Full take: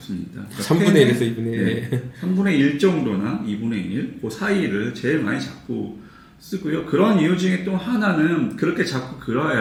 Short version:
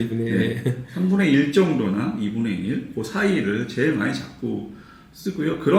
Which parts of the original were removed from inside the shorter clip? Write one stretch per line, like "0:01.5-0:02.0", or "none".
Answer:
none